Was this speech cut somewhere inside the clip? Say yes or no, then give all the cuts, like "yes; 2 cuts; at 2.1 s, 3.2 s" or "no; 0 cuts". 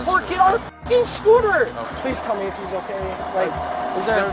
yes; 1 cut; at 1.9 s